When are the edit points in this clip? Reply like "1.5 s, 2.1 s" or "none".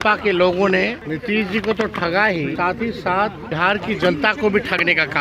1.0 s, 2.5 s, 3.5 s

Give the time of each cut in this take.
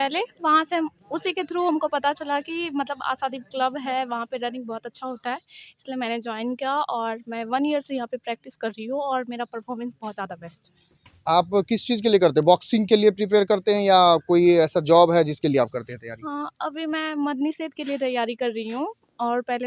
none

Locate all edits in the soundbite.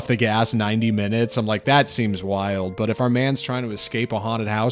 none

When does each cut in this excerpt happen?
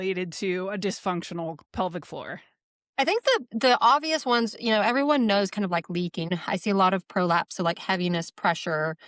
1.6 s, 6.3 s

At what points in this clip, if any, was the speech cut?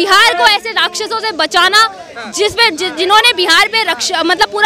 none

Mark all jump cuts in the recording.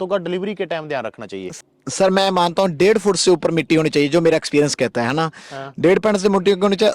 1.5 s

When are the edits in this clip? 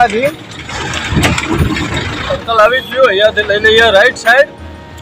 2.3 s

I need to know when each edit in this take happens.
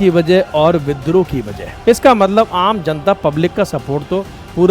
1.6 s

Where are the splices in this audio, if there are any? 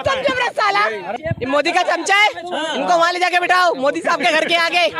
1.2 s

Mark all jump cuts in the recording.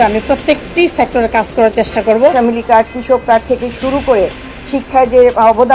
2.3 s

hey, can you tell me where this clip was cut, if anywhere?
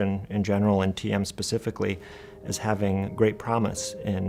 none

